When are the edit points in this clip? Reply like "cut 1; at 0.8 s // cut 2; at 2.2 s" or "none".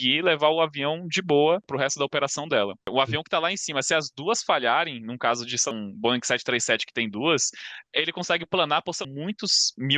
cut 1; at 1.7 s // cut 2; at 2.9 s // cut 3; at 5.7 s // cut 4; at 9.0 s